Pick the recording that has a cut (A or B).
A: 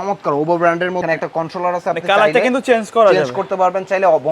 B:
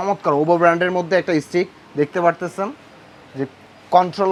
A